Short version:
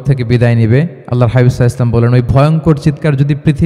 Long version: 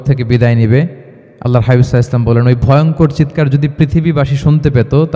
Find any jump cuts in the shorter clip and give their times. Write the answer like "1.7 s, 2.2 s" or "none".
1.0 s